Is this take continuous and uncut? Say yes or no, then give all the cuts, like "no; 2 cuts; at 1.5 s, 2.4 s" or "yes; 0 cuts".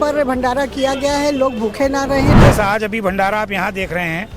no; 1 cut; at 2.3 s